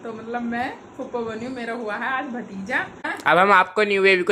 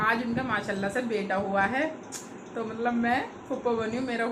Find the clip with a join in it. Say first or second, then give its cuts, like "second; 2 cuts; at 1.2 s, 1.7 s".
first; 1 cut; at 3.0 s